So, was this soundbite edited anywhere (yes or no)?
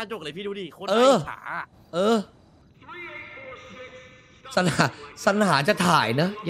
yes